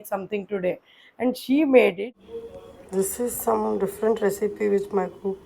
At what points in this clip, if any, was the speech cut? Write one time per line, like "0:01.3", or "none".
0:02.5